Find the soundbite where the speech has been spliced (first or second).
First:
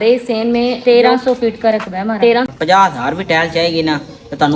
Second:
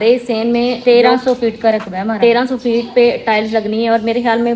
first